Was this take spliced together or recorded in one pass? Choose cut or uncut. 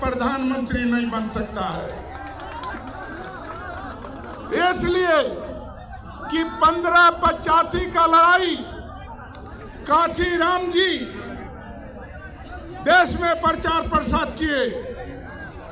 uncut